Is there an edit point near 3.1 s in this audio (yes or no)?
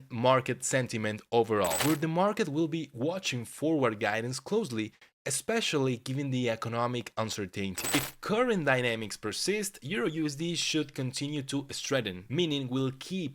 no